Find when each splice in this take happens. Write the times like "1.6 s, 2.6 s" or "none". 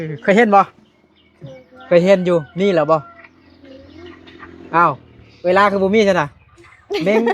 none